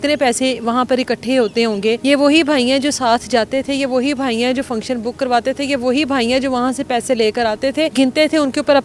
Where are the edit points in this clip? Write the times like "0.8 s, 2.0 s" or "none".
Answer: 2.0 s, 7.9 s